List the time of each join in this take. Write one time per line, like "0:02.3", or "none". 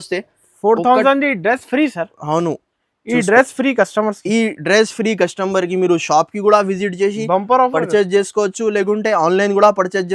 none